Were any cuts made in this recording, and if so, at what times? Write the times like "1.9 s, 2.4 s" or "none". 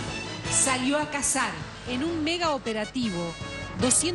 none